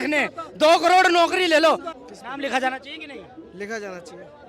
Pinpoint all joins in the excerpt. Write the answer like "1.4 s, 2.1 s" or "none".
1.9 s